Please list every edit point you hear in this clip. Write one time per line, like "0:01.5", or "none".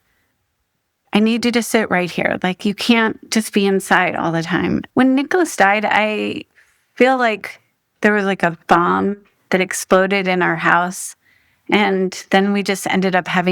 0:04.9